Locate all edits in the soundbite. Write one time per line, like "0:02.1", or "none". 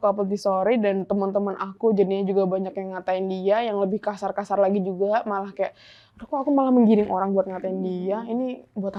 none